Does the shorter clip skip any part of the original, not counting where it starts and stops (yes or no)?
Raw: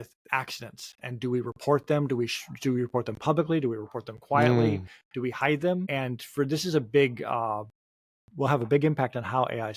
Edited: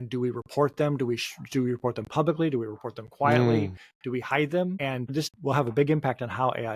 yes